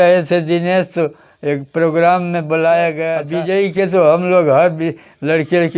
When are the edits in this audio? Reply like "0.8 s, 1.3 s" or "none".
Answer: 3.1 s